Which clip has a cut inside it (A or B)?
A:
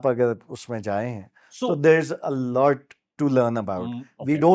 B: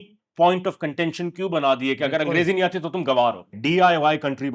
B